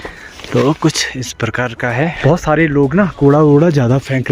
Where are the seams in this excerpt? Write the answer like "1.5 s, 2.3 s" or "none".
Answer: 2.2 s